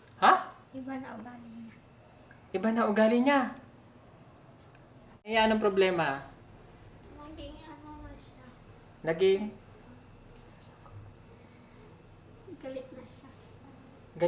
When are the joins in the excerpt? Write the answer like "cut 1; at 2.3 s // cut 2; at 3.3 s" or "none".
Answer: cut 1; at 5.3 s

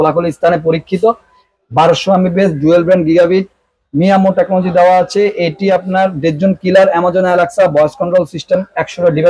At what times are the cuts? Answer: none

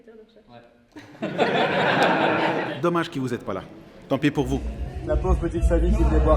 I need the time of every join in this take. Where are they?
cut 1; at 2.7 s // cut 2; at 4.8 s

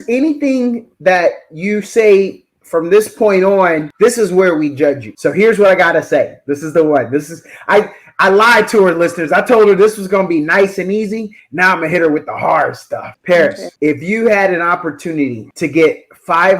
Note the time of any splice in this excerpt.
cut 1; at 3.9 s // cut 2; at 5.1 s // cut 3; at 13.1 s // cut 4; at 13.7 s // cut 5; at 15.4 s

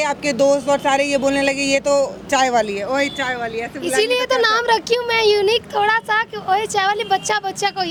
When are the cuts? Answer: none

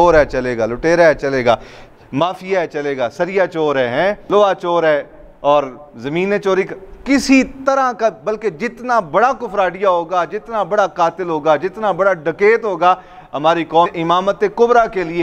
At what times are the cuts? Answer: cut 1; at 4.2 s

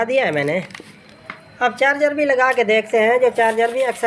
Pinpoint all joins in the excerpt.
none

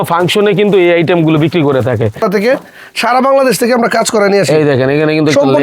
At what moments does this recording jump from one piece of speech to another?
cut 1; at 2.2 s

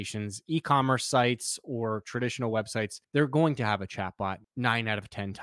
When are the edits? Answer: cut 1; at 3.0 s // cut 2; at 4.4 s

